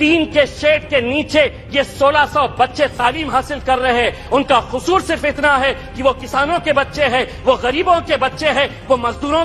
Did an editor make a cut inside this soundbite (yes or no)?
no